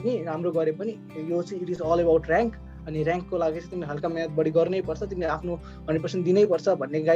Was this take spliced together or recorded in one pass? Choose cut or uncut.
uncut